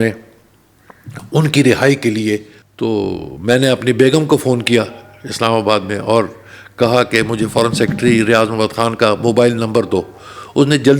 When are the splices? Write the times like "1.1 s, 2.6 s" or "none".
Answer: 2.6 s